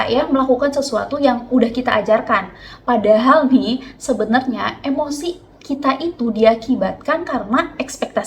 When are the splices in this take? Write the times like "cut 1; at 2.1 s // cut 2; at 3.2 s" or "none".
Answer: none